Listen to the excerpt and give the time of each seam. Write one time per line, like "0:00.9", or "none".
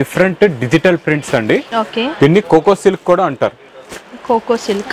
none